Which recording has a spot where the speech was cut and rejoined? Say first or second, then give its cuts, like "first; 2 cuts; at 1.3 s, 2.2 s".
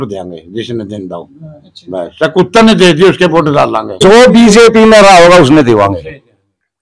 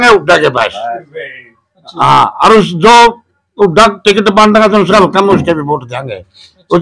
first; 1 cut; at 4.0 s